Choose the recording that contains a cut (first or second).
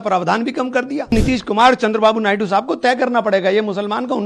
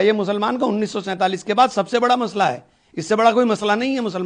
first